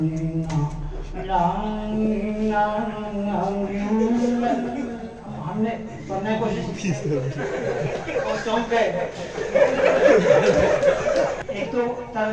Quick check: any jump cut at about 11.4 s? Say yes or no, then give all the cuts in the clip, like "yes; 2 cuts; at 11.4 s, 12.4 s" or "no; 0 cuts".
yes; 1 cut; at 11.4 s